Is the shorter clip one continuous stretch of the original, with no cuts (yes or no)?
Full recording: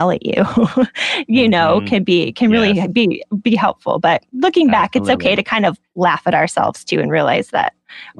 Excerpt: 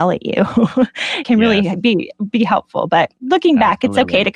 no